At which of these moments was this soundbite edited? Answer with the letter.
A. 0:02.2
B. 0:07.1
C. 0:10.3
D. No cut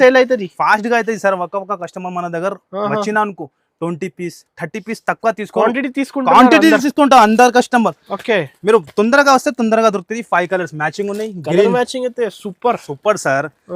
D